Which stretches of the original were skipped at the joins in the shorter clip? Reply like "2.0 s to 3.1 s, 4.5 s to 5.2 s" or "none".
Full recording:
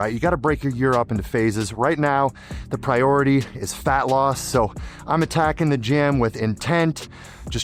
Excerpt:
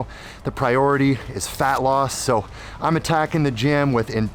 none